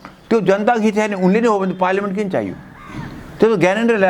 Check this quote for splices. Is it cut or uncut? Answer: uncut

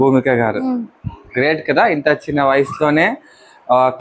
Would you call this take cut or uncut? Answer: uncut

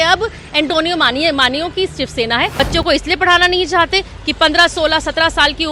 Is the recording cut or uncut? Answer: cut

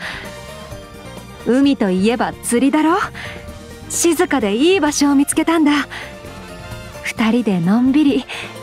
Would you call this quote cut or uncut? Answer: uncut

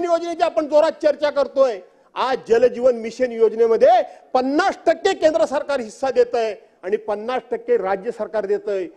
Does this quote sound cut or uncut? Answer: uncut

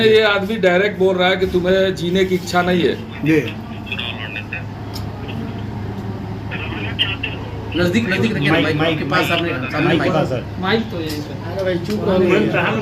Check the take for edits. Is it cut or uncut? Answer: uncut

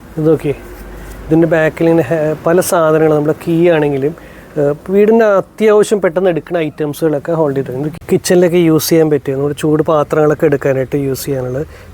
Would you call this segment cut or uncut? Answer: cut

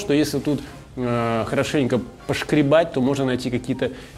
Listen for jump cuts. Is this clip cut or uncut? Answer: uncut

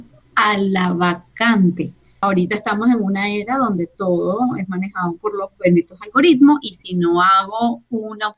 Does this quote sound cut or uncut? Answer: cut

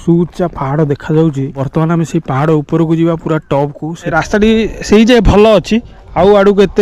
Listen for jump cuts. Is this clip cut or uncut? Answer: cut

